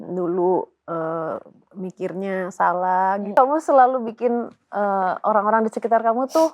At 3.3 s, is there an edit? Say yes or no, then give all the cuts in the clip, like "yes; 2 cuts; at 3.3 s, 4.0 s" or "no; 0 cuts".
yes; 1 cut; at 3.3 s